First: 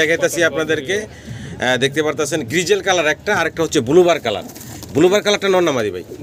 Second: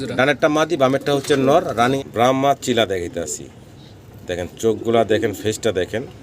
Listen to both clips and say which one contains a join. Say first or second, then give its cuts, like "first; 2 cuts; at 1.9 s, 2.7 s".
second; 1 cut; at 2.0 s